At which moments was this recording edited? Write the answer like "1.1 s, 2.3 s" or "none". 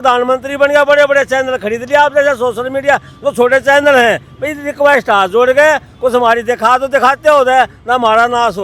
none